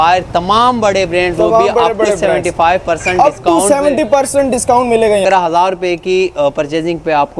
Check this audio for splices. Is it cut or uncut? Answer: cut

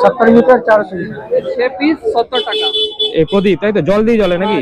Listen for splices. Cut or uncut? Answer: cut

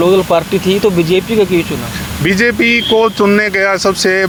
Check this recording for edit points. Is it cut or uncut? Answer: uncut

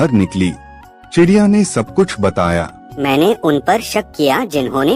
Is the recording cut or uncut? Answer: cut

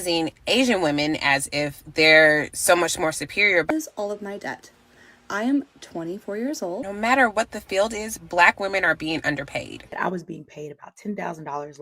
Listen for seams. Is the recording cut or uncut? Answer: cut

